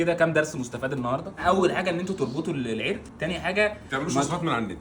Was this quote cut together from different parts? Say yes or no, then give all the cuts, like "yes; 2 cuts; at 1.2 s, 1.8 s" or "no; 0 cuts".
yes; 1 cut; at 1.4 s